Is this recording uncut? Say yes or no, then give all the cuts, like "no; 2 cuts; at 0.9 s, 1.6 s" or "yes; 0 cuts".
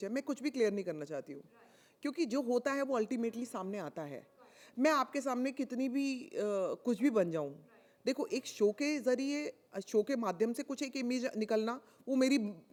yes; 0 cuts